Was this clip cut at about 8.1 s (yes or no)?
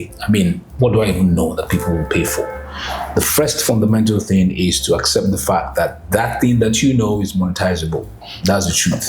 no